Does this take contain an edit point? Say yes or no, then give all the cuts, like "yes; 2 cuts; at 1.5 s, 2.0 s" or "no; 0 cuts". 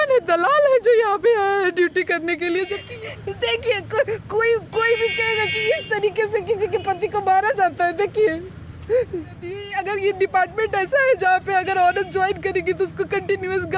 yes; 2 cuts; at 2.8 s, 9.6 s